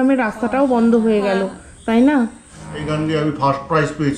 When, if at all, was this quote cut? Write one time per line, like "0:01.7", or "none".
0:02.7